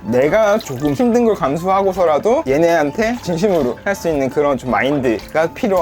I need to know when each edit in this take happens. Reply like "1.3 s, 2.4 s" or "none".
0.9 s